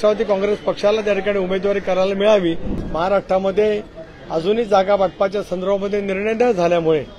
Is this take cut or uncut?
cut